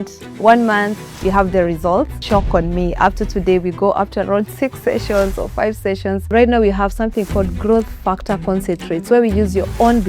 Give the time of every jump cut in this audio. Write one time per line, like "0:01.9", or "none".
0:02.2
0:06.3